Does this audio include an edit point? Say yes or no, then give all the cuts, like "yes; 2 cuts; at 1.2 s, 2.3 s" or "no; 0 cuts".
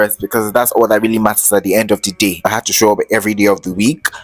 yes; 1 cut; at 2.5 s